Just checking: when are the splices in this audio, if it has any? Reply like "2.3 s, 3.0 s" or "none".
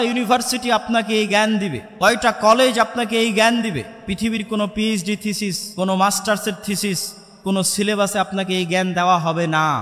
1.8 s, 5.6 s